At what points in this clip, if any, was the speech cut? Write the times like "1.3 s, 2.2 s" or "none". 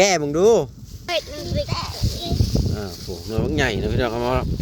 1.0 s